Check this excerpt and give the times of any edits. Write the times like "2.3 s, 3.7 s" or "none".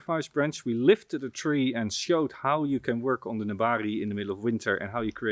none